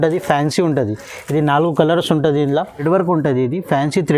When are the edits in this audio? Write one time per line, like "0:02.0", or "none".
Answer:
0:02.8